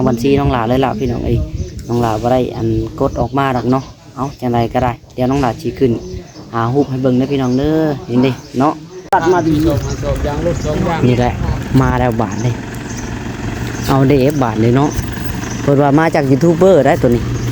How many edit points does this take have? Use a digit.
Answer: 1